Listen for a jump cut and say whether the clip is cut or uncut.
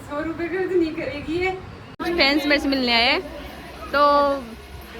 cut